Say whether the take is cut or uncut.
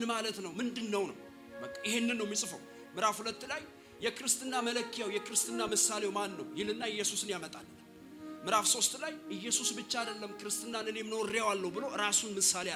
uncut